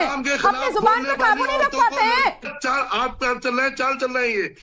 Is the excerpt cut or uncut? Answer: cut